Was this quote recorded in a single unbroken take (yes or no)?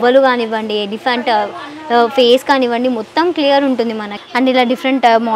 no